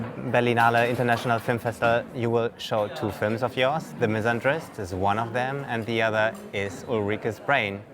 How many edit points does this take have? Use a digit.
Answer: 1